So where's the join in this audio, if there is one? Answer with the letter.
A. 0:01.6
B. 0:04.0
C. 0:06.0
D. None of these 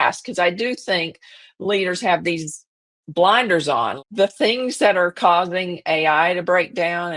B